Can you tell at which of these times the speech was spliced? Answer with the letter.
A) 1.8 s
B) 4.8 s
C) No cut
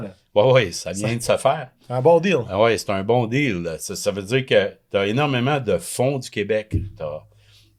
C